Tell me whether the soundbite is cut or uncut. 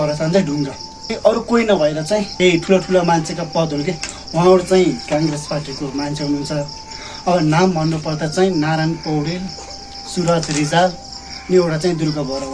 cut